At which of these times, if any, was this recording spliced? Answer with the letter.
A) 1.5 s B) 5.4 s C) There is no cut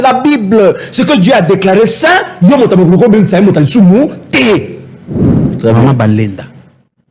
B